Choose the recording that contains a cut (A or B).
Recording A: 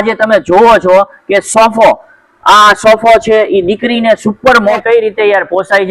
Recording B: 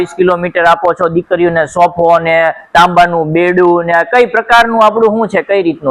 A